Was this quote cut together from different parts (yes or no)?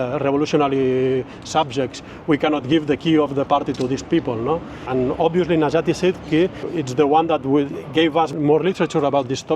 yes